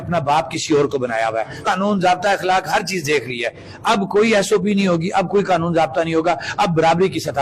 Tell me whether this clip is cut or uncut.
cut